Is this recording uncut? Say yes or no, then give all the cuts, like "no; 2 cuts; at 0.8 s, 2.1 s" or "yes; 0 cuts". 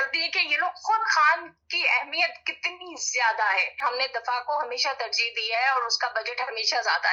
no; 1 cut; at 3.7 s